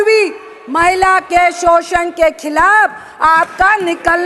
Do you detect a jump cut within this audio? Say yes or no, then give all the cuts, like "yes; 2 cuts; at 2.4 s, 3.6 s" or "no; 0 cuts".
no; 0 cuts